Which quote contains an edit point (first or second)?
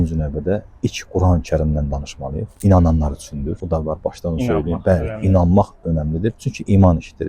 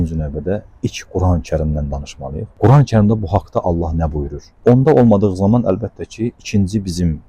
first